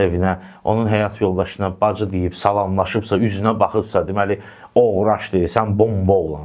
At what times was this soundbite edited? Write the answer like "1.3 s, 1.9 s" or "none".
none

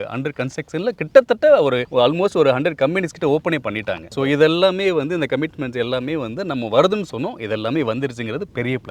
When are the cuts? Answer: none

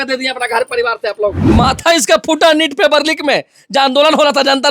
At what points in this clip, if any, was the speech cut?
1.5 s

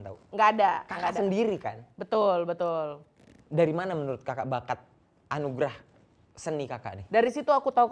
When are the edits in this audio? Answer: none

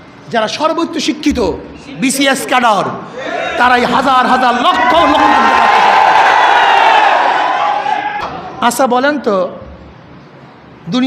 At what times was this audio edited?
8.2 s

